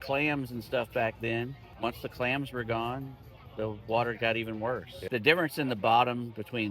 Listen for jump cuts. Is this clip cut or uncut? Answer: cut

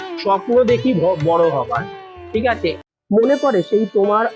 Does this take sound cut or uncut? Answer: cut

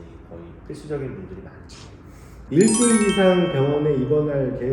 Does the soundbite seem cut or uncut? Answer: cut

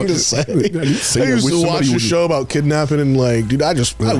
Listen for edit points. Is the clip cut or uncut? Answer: uncut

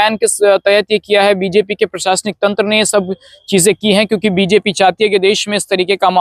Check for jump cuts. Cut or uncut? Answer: uncut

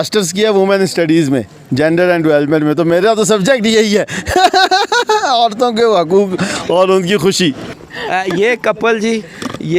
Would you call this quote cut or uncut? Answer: cut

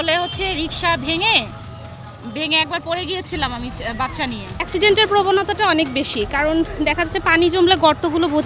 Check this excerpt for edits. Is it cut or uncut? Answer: cut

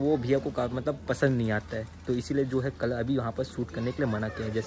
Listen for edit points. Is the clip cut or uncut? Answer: uncut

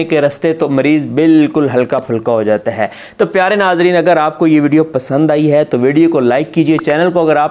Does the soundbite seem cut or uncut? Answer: uncut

